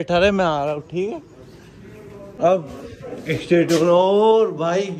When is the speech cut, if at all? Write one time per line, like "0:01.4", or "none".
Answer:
0:02.2